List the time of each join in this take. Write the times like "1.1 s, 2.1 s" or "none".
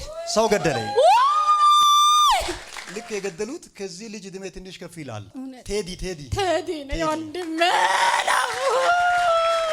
2.8 s